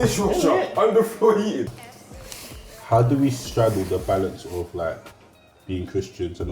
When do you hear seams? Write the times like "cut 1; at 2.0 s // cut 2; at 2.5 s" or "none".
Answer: cut 1; at 1.6 s

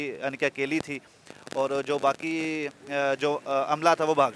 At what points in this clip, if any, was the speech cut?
none

